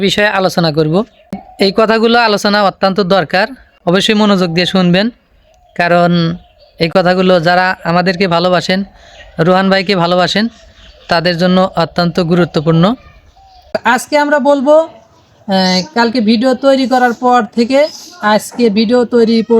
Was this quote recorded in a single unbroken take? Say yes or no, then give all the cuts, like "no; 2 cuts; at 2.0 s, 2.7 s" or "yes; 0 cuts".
no; 2 cuts; at 1.4 s, 13.8 s